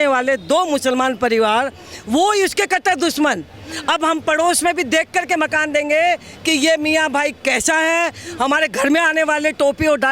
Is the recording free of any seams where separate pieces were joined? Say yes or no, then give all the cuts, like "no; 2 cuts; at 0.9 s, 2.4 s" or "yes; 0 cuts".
yes; 0 cuts